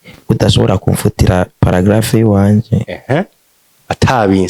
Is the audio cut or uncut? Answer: uncut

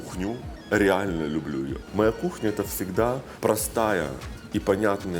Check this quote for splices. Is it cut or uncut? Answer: cut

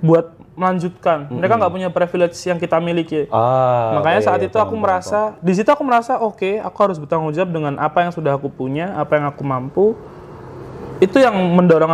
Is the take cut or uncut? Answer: uncut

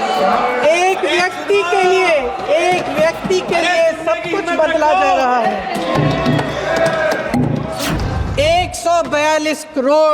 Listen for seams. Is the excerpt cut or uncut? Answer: cut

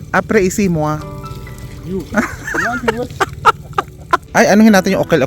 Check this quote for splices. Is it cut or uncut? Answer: cut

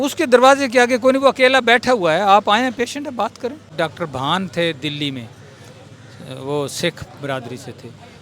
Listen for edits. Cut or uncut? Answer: cut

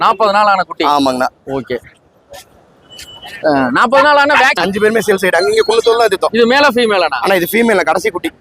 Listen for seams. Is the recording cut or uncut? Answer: cut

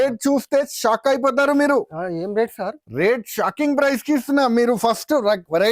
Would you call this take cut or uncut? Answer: uncut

